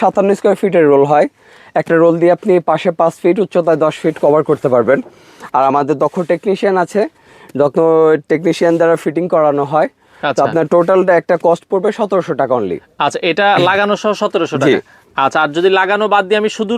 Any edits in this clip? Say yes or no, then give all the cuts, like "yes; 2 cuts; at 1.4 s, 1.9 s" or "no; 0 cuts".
no; 0 cuts